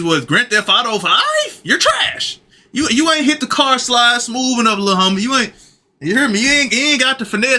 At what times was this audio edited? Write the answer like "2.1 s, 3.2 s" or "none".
none